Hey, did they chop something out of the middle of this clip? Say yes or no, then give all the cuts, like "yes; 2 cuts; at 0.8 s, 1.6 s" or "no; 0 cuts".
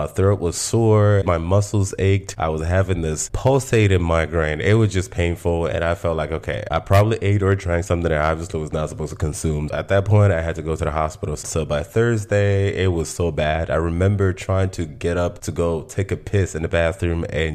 yes; 4 cuts; at 1.2 s, 2.3 s, 6.6 s, 11.4 s